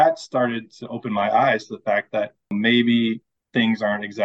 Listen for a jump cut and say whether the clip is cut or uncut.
cut